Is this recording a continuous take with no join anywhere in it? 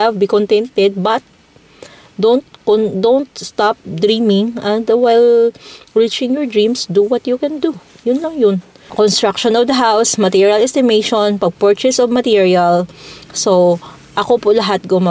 no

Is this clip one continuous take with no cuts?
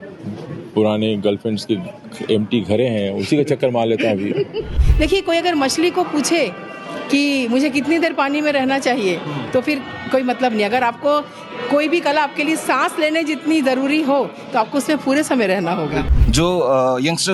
no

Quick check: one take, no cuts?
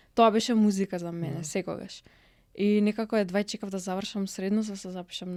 yes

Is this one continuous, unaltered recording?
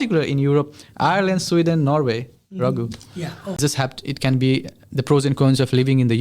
no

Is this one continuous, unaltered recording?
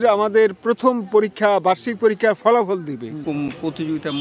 no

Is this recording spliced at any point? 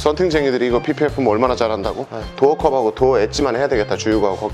no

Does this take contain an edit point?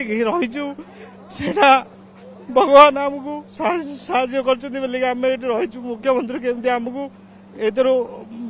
no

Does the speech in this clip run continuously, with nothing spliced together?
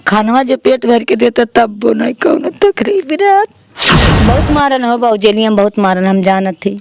no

